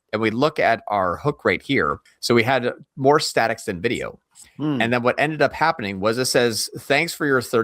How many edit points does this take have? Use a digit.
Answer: 1